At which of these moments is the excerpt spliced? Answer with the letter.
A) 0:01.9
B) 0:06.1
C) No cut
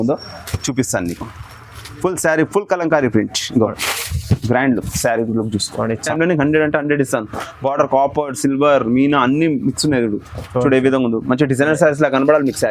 B